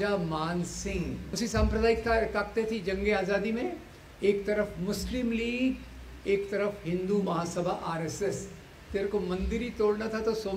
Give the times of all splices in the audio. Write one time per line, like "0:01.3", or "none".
0:01.4
0:08.6